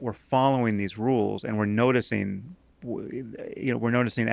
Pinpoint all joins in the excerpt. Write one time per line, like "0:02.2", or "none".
0:01.7